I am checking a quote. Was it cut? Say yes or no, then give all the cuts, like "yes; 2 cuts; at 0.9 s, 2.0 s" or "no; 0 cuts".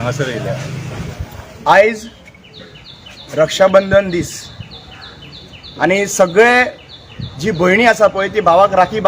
yes; 1 cut; at 1.0 s